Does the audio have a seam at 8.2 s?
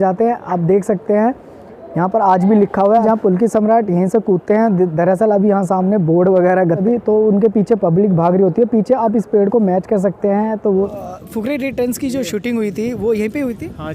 no; 3 cuts; at 3.0 s, 6.8 s, 10.9 s

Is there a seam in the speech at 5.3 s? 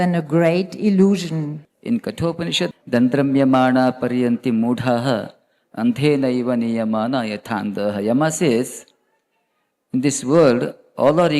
no; 2 cuts; at 1.6 s, 2.7 s

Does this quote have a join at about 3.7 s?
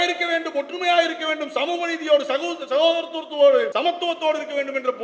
yes; 1 cut; at 3.7 s

